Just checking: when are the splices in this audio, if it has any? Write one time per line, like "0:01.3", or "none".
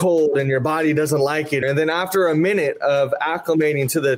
0:01.6